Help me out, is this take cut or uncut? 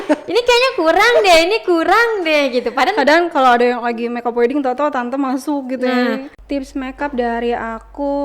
cut